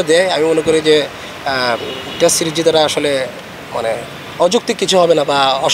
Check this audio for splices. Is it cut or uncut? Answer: uncut